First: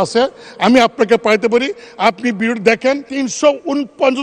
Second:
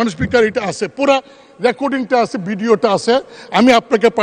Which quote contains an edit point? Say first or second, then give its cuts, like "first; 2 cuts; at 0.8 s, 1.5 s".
first; 1 cut; at 3.1 s